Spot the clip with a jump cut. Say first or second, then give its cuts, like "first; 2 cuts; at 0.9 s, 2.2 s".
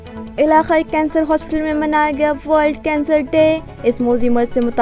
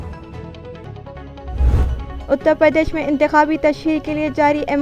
second; 1 cut; at 1.6 s